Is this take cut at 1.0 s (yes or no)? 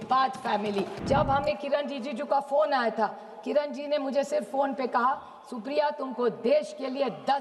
yes